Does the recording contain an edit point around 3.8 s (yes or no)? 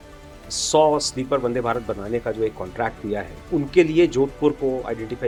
no